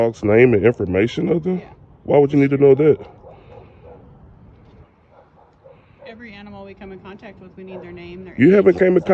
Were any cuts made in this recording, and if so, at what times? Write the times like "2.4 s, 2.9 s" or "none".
none